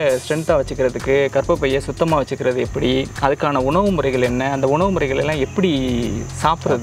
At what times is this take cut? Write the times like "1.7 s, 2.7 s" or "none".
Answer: none